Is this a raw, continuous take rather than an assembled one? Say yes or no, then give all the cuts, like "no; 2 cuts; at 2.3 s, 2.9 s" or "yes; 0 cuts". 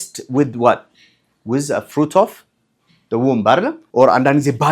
no; 1 cut; at 3.8 s